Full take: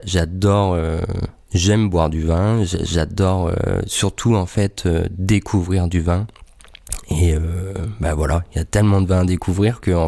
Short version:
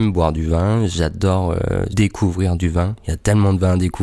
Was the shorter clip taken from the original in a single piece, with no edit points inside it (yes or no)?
no